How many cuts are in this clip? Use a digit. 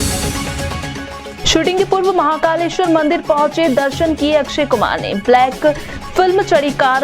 1